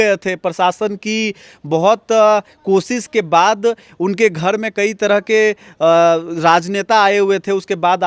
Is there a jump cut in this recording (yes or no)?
no